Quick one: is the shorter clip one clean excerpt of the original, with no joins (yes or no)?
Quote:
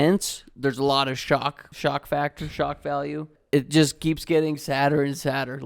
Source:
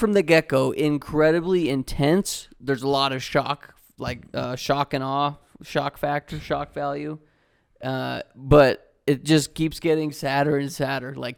no